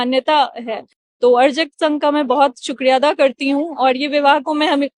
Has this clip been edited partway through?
no; 0 cuts

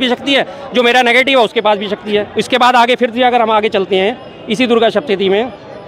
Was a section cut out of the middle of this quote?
no; 0 cuts

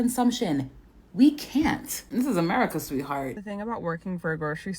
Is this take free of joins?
no; 1 cut; at 3.4 s

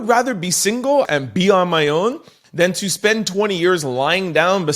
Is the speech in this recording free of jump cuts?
no; 1 cut; at 1.1 s

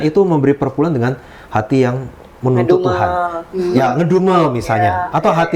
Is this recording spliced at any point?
no; 0 cuts

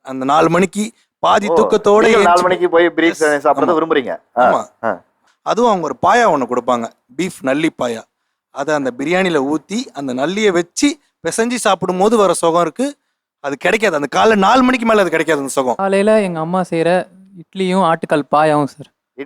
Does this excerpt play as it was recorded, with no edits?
no; 1 cut; at 15.8 s

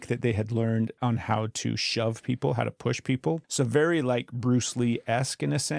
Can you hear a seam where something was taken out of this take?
yes; 2 cuts; at 0.9 s, 3.5 s

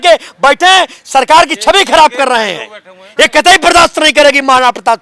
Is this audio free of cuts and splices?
yes; 0 cuts

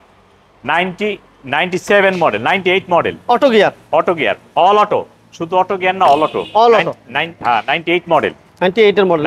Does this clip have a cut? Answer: no; 0 cuts

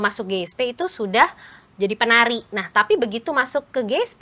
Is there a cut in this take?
no; 0 cuts

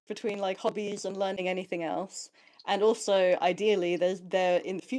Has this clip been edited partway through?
no; 0 cuts

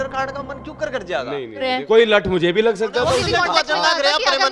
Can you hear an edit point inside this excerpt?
yes; 2 cuts; at 1.7 s, 3.2 s

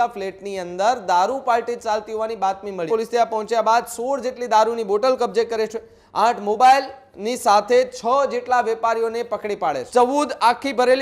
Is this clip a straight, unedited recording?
no; 2 cuts; at 2.9 s, 9.8 s

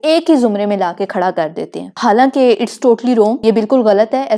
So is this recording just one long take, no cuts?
no; 2 cuts; at 2.0 s, 3.4 s

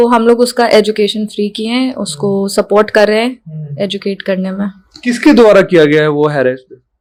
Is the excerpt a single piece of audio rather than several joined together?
yes; 0 cuts

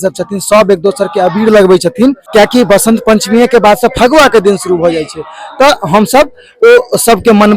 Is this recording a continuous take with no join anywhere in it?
no; 1 cut; at 2.2 s

